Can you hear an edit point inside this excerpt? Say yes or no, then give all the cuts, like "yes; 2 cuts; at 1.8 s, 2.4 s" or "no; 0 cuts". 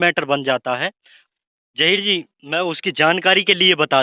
yes; 1 cut; at 1.4 s